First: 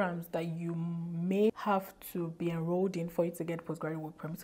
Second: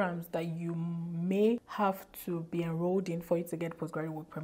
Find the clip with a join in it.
first; 1 cut; at 1.5 s

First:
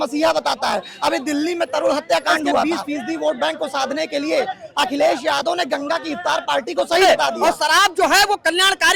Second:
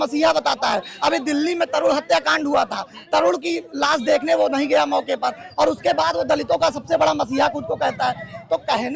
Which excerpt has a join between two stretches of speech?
first; 2 cuts; at 2.6 s, 7.0 s

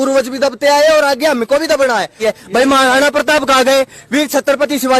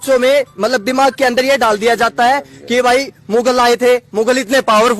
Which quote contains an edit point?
first; 1 cut; at 2.2 s

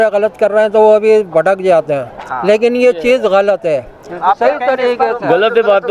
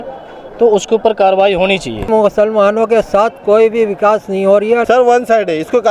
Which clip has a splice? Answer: second; 2 cuts; at 2.1 s, 4.8 s

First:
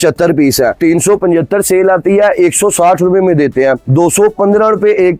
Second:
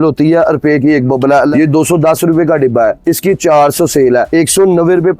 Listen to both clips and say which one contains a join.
second; 2 cuts; at 1.5 s, 4.3 s

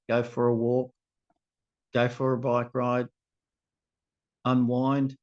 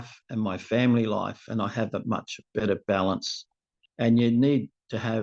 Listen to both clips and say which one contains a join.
first; 1 cut; at 1.7 s

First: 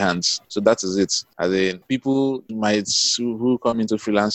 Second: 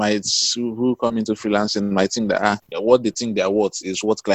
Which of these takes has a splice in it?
second; 1 cut; at 2.7 s

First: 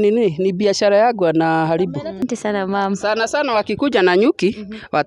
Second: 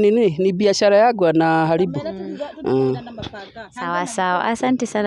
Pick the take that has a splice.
first; 1 cut; at 2.2 s

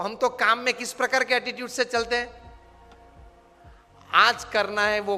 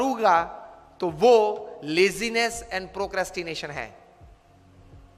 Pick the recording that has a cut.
second; 1 cut; at 4.0 s

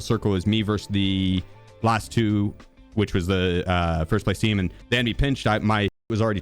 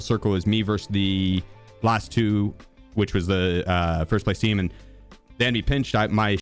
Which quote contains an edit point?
first; 1 cut; at 4.8 s

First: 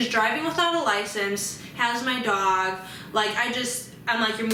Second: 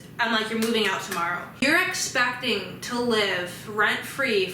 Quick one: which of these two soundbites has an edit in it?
second; 1 cut; at 1.6 s

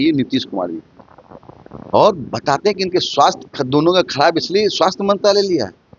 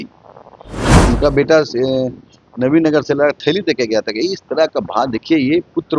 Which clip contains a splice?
second; 1 cut; at 0.9 s

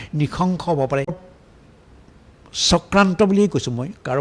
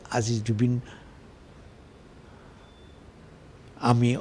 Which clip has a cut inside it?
first; 1 cut; at 1.2 s

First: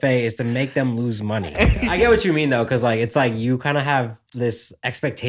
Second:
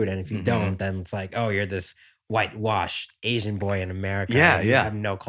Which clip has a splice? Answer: first; 2 cuts; at 1.9 s, 4.2 s

